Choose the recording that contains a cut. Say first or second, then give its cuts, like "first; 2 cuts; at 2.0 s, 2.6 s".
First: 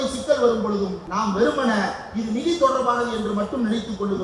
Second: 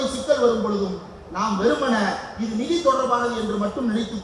first; 1 cut; at 1.0 s